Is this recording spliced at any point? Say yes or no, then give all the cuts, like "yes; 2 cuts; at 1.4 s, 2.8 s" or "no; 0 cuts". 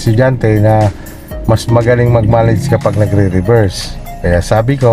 no; 0 cuts